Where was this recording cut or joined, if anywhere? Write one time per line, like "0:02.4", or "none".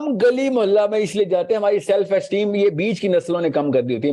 none